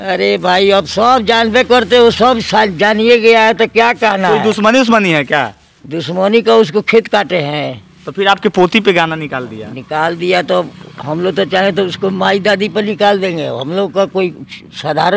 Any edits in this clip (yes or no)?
no